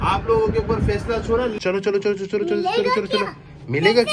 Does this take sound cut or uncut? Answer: cut